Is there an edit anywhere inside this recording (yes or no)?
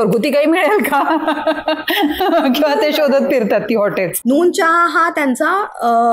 yes